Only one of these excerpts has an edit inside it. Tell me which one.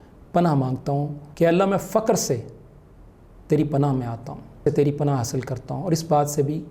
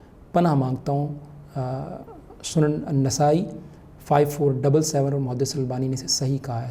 first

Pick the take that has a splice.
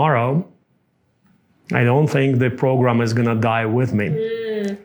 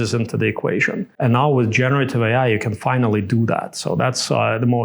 second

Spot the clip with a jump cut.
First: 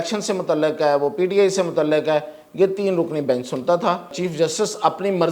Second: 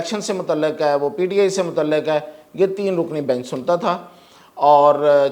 first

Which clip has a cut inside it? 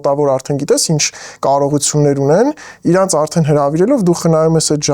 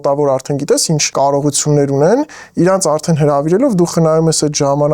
second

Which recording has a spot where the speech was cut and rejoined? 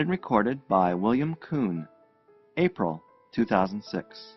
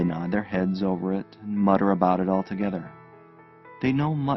first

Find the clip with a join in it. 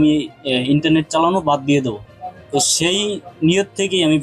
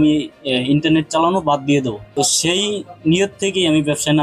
second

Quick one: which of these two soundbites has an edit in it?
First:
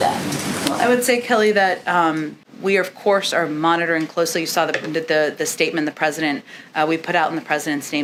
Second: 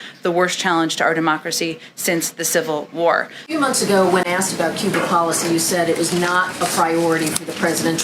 second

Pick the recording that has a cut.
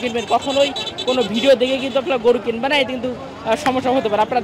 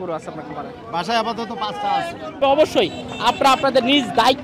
second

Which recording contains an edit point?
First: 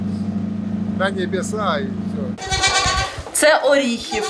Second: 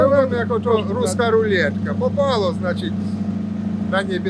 first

